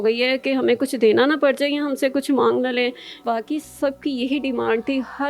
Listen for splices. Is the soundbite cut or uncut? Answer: cut